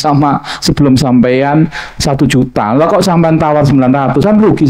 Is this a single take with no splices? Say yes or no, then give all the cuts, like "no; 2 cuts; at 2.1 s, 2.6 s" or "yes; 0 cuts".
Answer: yes; 0 cuts